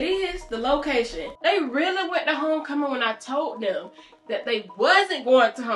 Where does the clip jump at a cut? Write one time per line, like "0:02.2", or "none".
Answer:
0:01.2